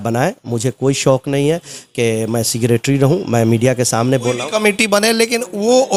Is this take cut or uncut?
uncut